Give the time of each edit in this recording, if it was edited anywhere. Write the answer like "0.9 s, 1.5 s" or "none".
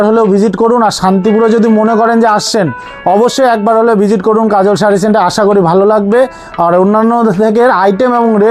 none